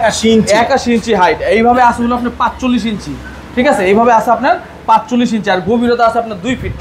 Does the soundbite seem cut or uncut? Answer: uncut